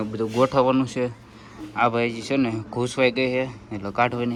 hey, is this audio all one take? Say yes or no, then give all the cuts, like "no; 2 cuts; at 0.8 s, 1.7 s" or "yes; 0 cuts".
yes; 0 cuts